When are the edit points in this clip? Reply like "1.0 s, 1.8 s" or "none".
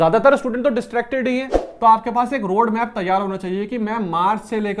1.6 s

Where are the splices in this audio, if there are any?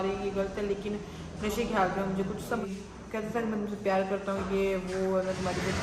2.6 s

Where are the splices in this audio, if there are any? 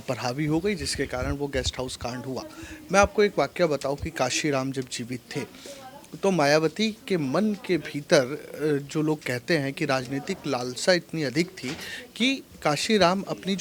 none

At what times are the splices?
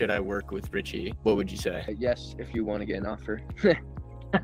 none

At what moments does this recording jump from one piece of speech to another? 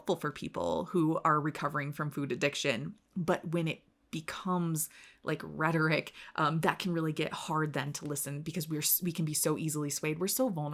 none

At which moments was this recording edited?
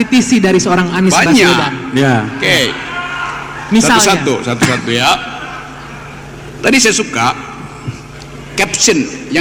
none

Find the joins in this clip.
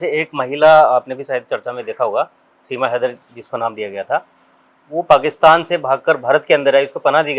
none

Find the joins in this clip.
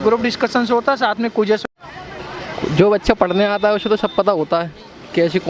1.6 s

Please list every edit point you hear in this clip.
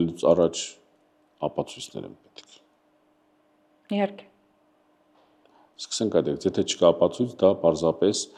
none

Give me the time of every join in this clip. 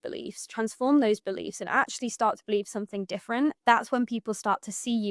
3.6 s

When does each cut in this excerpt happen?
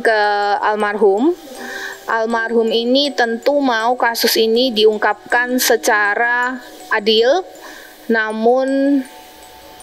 none

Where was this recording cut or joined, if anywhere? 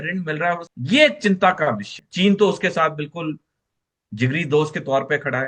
2.0 s

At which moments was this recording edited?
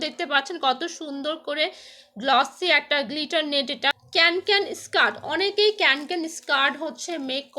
4.0 s

